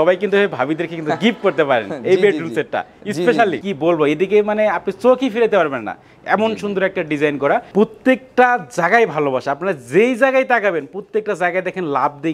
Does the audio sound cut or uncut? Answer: cut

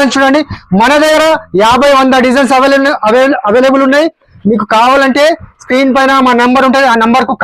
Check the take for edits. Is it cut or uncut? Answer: uncut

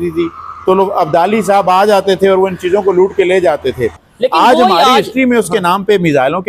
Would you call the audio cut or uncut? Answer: cut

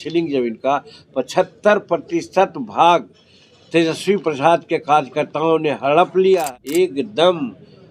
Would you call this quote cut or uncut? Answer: cut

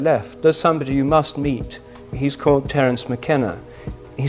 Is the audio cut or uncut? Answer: cut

